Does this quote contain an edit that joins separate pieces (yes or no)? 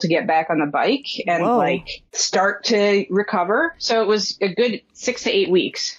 no